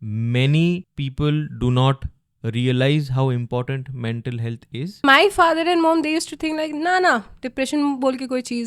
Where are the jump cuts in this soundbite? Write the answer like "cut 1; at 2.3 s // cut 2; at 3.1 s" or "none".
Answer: cut 1; at 1.0 s // cut 2; at 5.0 s